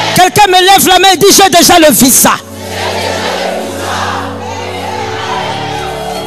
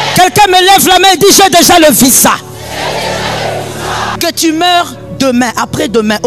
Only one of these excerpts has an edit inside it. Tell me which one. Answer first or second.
second